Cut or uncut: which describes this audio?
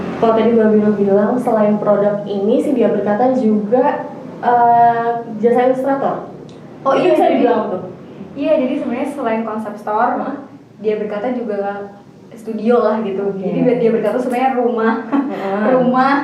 uncut